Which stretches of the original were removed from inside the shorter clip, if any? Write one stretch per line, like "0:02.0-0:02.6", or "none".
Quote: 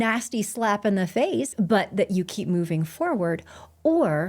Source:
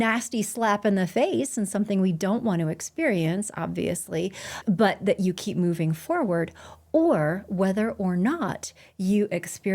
0:01.5-0:04.6